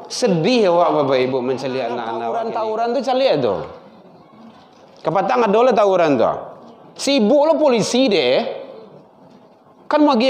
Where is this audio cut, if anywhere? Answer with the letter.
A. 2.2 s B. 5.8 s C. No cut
A